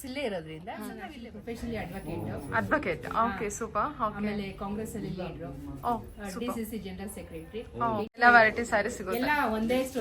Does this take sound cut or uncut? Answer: cut